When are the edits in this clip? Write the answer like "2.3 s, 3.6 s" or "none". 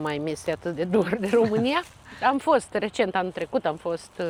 none